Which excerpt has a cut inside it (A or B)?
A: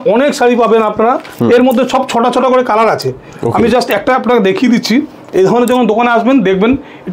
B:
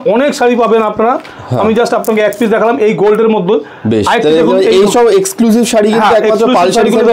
A